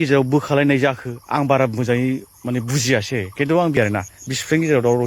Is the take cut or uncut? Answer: cut